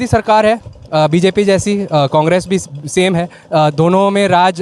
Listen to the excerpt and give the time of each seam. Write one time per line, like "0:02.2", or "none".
none